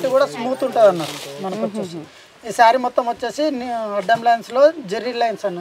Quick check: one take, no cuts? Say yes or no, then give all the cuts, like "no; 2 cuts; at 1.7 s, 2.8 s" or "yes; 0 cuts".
yes; 0 cuts